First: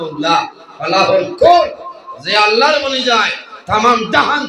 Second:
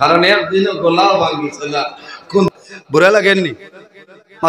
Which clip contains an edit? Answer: second; 1 cut; at 2.5 s

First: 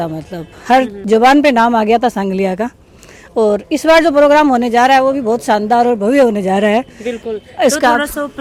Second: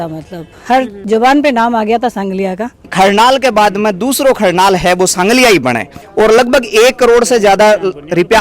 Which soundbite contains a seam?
second; 2 cuts; at 2.8 s, 5.9 s

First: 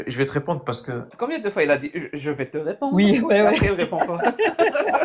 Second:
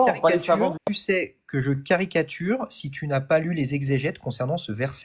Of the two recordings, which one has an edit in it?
first; 1 cut; at 1.1 s

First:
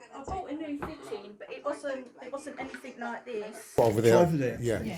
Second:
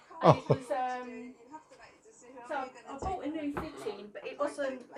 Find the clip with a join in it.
first; 1 cut; at 3.6 s

